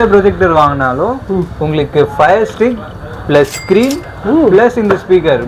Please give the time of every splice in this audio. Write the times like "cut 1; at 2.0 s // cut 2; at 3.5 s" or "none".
none